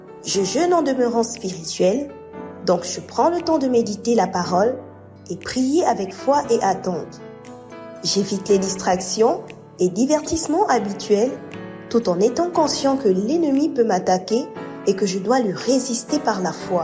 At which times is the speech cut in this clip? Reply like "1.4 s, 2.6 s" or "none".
none